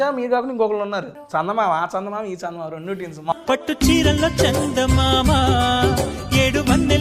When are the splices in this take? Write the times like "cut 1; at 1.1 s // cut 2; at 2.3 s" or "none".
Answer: cut 1; at 1.2 s // cut 2; at 3.3 s